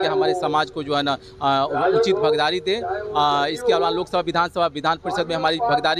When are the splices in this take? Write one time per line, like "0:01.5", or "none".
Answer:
none